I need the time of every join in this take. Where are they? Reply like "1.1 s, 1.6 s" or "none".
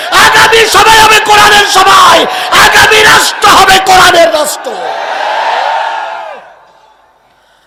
none